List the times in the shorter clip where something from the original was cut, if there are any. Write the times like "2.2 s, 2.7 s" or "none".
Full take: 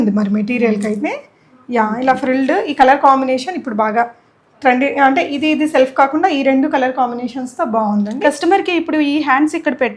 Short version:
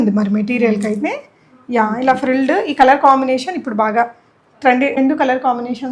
5.0 s